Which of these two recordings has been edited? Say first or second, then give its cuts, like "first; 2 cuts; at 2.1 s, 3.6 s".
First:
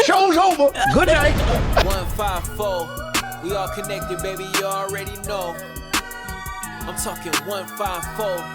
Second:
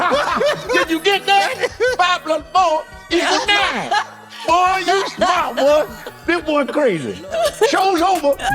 first; 1 cut; at 1.8 s